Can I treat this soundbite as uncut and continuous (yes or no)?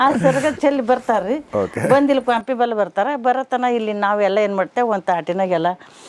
yes